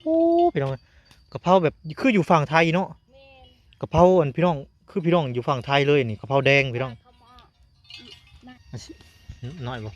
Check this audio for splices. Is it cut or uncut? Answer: cut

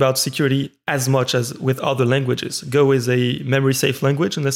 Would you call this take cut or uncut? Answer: uncut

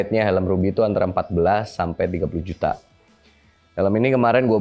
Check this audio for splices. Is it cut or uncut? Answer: uncut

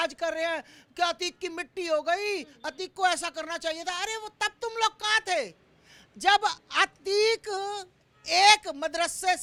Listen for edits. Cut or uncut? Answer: uncut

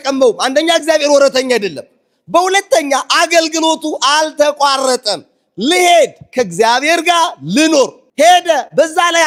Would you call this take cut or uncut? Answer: uncut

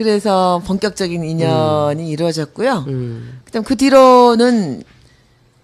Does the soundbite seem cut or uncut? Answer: uncut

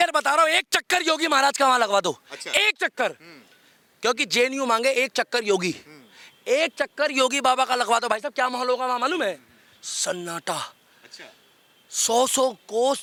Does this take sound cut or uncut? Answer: uncut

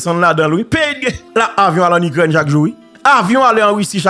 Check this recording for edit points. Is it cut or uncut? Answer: cut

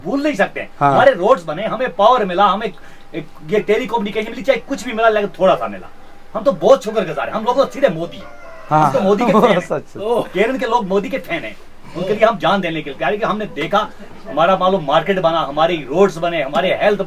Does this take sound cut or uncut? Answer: uncut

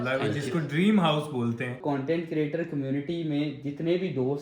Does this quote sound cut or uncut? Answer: cut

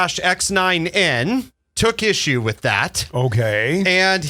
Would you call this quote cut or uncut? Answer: uncut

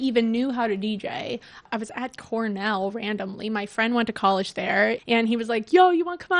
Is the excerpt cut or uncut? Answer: cut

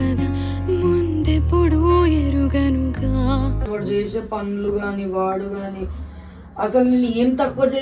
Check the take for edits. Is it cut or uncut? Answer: uncut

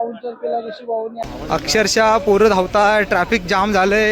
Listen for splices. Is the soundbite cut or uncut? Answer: cut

